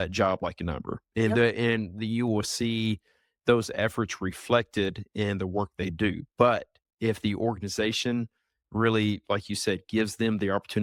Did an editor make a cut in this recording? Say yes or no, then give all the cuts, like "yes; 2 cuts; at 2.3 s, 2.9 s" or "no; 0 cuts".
no; 0 cuts